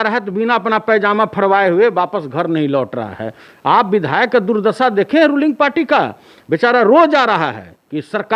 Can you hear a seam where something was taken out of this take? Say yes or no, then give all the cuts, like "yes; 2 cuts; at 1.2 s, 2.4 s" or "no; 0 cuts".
no; 0 cuts